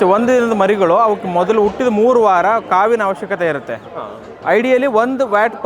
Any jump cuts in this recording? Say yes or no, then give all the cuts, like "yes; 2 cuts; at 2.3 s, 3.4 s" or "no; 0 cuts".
no; 0 cuts